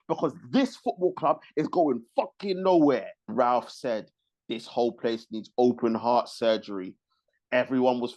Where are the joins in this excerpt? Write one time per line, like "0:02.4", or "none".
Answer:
0:03.3